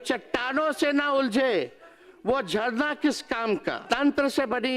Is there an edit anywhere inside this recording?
yes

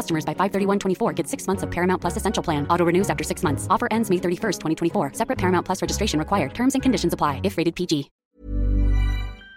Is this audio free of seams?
yes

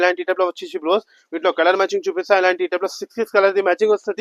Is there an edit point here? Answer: no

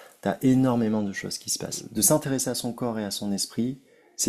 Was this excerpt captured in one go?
no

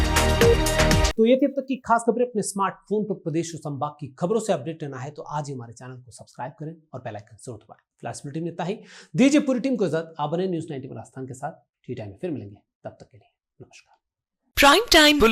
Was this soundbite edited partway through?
no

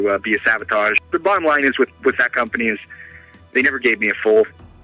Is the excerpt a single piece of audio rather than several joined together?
yes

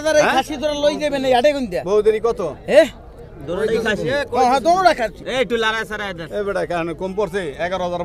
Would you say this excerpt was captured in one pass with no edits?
no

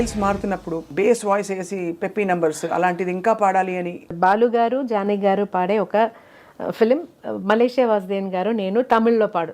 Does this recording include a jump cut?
yes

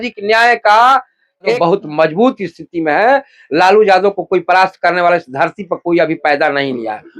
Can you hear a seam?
yes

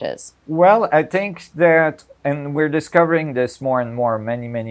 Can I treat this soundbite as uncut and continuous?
yes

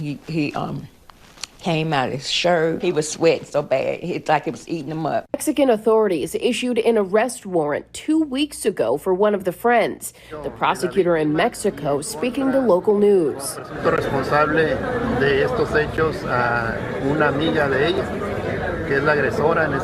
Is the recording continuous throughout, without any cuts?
no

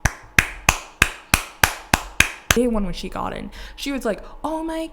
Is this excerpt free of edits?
no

